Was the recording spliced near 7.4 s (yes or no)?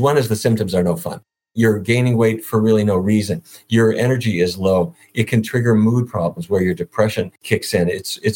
yes